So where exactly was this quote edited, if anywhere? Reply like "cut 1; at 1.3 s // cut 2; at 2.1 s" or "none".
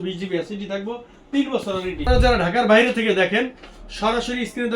cut 1; at 2.0 s